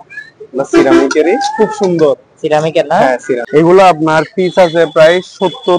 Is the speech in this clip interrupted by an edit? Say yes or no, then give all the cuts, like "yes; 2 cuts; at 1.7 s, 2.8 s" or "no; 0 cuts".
yes; 1 cut; at 3.4 s